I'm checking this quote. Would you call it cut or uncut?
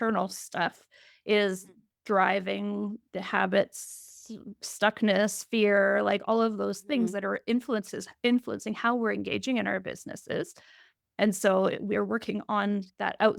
uncut